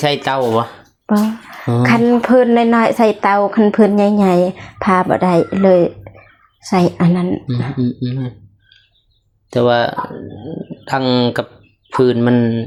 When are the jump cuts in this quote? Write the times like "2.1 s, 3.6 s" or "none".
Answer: none